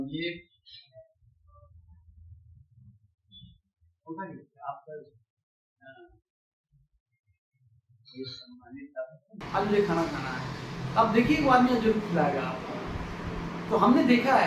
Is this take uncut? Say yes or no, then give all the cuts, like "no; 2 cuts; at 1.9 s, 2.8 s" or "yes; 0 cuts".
no; 1 cut; at 9.4 s